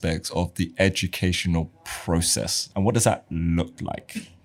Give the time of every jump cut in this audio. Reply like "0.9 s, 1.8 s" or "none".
none